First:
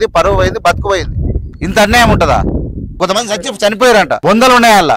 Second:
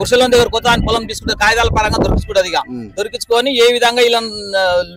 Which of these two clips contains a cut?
first; 3 cuts; at 1.5 s, 2.9 s, 4.1 s

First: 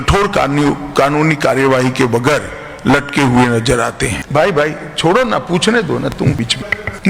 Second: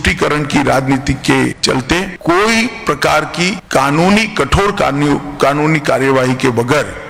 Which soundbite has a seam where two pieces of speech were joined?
first; 1 cut; at 4.2 s

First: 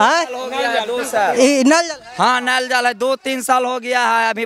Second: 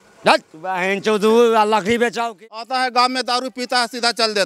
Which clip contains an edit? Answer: second; 1 cut; at 2.3 s

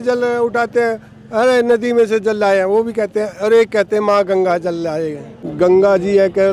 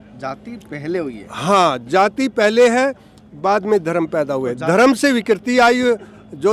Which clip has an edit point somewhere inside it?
first; 1 cut; at 5.5 s

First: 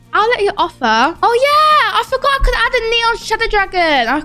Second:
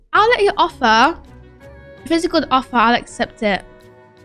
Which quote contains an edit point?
first; 1 cut; at 1.2 s

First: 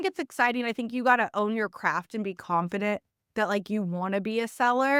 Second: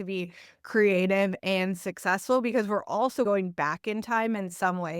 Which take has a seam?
second; 1 cut; at 3.3 s

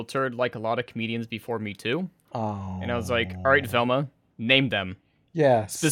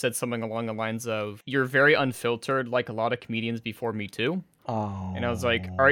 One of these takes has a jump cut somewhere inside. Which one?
second; 1 cut; at 1.4 s

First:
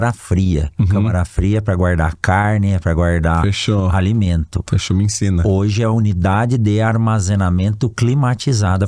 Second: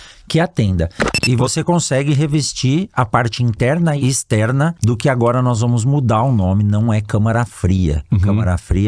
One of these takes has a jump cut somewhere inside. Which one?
second; 2 cuts; at 1.1 s, 4.3 s

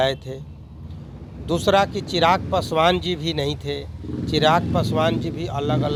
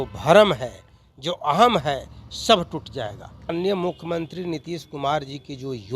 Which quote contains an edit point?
second; 1 cut; at 3.5 s

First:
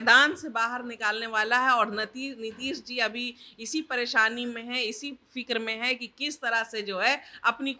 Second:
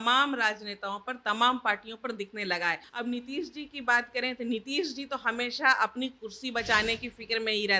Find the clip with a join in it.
second; 1 cut; at 2.9 s

